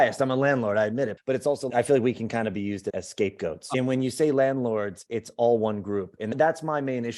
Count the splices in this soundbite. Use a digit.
2